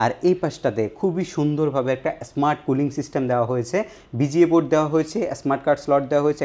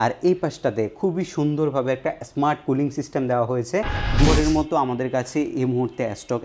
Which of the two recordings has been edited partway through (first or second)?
second